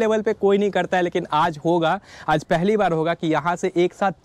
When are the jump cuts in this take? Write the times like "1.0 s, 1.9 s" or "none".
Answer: none